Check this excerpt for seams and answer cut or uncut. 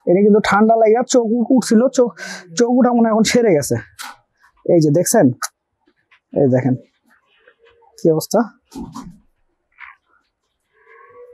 uncut